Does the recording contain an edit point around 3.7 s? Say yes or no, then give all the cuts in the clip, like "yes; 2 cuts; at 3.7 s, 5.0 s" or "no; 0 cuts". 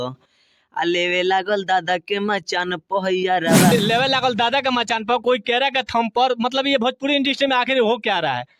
yes; 1 cut; at 3.7 s